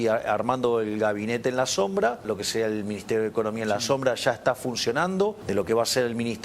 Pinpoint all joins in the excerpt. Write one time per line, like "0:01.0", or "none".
0:02.2
0:05.4